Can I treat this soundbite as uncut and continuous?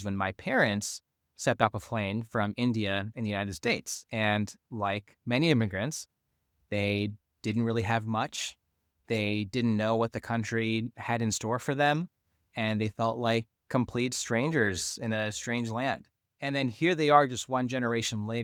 yes; 0 cuts

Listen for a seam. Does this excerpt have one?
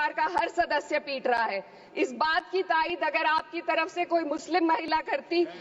no; 0 cuts

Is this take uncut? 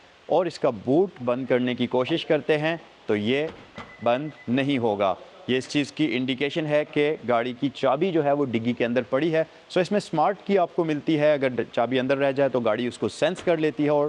yes; 0 cuts

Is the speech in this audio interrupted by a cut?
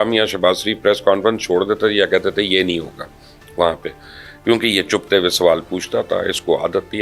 no; 0 cuts

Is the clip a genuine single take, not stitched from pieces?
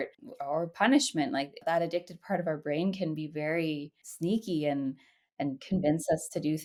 yes; 0 cuts

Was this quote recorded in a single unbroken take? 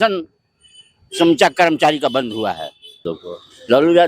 no; 1 cut; at 3.1 s

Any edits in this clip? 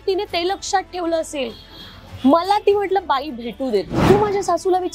yes; 1 cut; at 3.9 s

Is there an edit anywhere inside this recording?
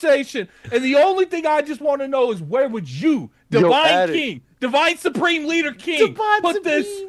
no; 0 cuts

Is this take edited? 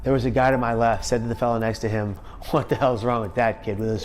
yes; 2 cuts; at 1.0 s, 2.3 s

